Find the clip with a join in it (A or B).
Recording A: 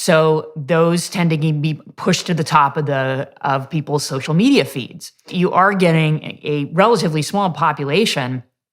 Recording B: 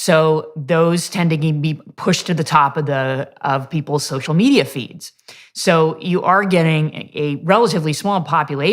A